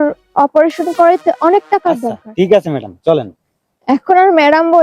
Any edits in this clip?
yes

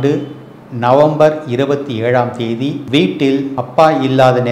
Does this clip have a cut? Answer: yes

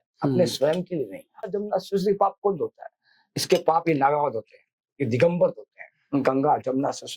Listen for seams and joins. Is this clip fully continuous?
no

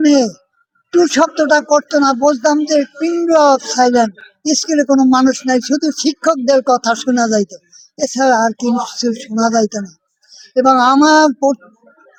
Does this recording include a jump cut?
no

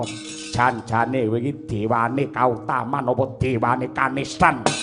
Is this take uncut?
yes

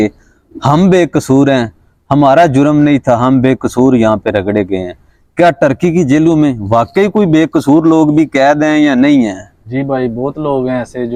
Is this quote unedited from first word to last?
yes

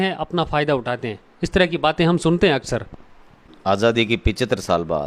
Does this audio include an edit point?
no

